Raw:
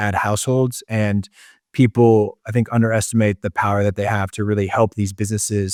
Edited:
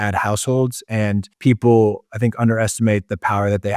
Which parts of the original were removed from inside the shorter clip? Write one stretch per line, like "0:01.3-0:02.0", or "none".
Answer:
0:01.3-0:01.6